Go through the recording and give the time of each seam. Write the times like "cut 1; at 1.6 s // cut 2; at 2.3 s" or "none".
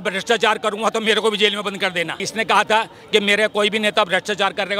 cut 1; at 2.2 s